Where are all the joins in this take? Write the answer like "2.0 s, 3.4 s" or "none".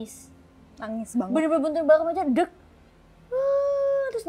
none